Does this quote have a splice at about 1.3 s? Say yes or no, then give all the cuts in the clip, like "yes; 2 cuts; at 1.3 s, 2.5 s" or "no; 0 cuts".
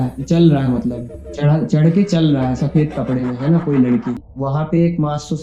no; 1 cut; at 4.3 s